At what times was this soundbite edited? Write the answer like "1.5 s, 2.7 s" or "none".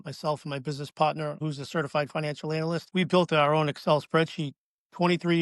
1.4 s, 2.9 s